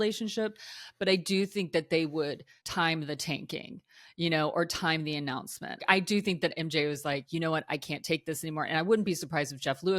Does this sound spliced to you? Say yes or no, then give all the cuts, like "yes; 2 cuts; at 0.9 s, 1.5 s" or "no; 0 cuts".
yes; 3 cuts; at 2.7 s, 5.8 s, 7.2 s